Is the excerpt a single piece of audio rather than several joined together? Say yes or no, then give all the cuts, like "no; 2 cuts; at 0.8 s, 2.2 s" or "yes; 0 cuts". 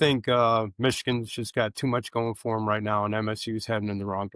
yes; 0 cuts